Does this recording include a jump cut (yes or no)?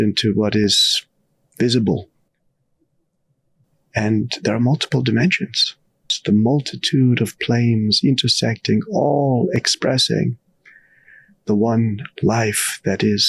yes